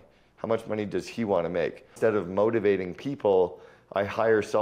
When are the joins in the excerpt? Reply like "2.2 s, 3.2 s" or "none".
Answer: 1.9 s